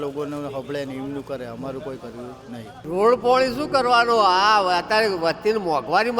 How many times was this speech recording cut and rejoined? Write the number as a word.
one